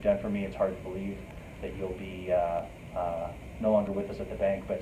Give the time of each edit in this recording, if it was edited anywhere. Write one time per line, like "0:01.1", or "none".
none